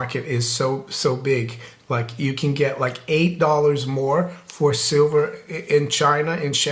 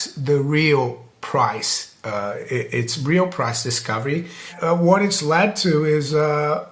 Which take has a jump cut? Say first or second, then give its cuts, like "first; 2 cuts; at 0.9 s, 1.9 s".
second; 1 cut; at 4.5 s